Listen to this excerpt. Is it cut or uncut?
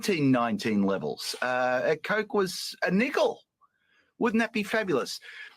cut